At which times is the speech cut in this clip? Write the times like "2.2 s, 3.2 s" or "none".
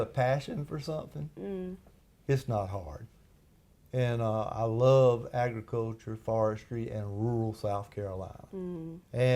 none